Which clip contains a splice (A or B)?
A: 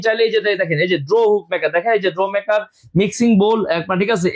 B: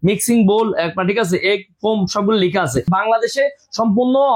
B